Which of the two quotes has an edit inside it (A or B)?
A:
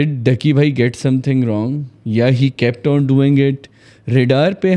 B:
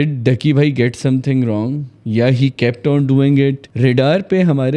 B